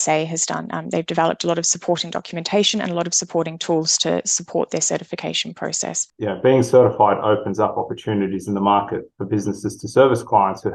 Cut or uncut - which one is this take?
cut